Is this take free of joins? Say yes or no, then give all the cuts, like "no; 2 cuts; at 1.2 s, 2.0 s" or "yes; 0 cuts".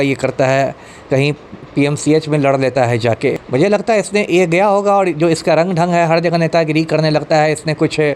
no; 1 cut; at 3.4 s